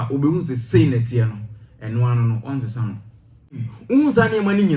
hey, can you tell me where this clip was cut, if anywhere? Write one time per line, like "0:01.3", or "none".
0:03.7